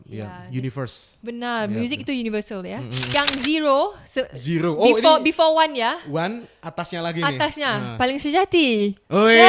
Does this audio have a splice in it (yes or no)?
yes